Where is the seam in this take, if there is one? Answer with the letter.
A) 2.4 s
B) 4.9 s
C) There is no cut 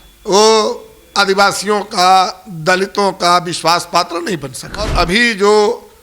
B